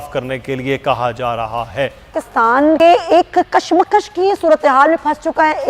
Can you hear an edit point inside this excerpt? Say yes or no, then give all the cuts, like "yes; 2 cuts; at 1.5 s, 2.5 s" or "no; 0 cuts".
yes; 1 cut; at 2.5 s